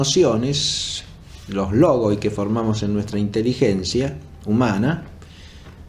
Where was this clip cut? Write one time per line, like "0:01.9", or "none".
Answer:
0:02.9